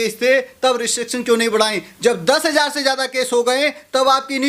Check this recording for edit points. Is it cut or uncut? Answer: uncut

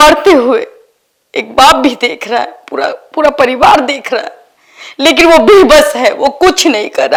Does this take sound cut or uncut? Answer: uncut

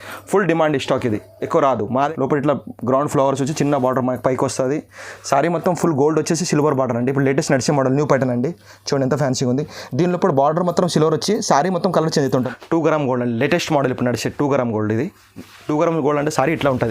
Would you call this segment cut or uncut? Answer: cut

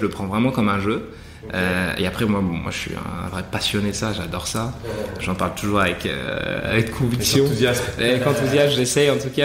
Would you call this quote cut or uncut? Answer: uncut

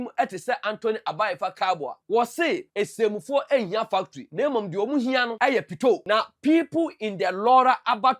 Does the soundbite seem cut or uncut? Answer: cut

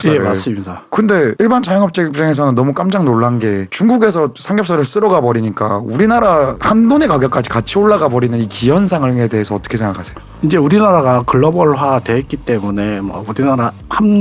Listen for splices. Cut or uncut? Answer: uncut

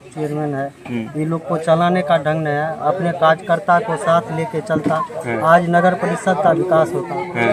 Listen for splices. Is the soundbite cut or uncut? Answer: uncut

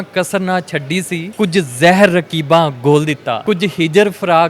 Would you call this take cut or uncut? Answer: cut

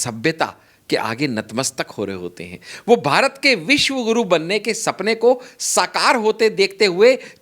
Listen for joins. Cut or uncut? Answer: uncut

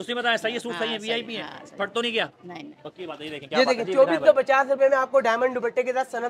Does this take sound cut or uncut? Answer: uncut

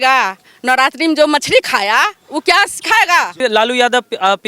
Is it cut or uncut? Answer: cut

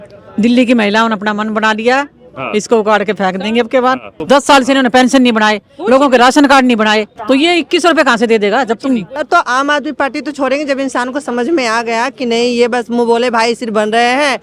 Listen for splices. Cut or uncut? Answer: cut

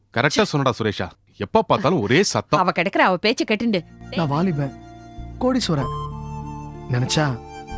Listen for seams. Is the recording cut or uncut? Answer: cut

